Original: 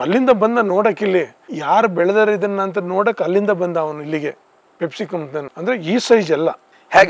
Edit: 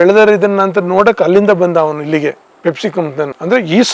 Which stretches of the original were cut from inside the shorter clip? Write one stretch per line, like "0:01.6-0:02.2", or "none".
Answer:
0:04.5-0:04.6